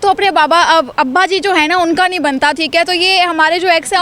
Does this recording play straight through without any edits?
yes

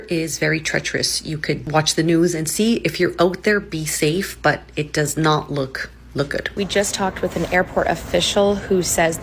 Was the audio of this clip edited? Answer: yes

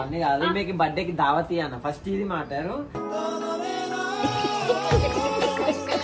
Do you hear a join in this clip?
no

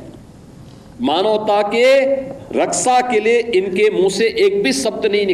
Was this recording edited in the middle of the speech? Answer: no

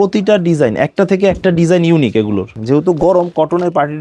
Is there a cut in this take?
yes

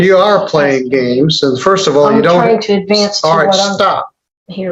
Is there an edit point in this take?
no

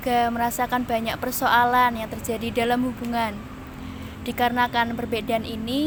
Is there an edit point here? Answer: no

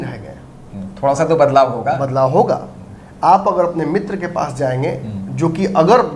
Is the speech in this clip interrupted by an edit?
no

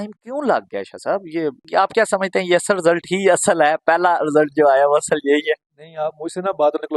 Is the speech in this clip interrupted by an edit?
no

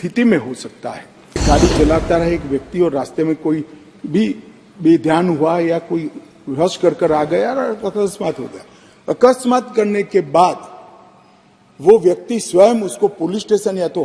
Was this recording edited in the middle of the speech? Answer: yes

